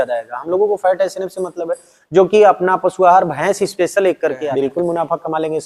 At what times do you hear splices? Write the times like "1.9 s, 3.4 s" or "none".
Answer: 4.5 s